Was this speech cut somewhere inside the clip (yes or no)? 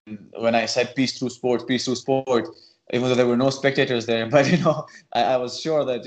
no